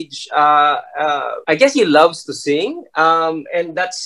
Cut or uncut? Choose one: cut